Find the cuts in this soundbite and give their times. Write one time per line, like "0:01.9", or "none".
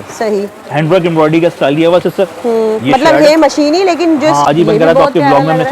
0:04.5